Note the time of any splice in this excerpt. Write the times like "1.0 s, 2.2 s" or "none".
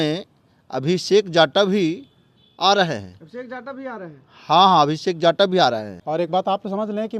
5.9 s